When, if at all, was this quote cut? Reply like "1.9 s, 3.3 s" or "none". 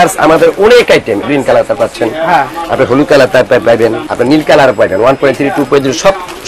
1.2 s, 4.1 s